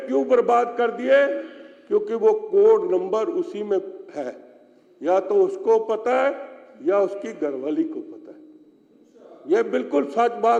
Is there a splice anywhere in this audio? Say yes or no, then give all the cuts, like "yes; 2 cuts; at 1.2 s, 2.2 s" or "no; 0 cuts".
no; 0 cuts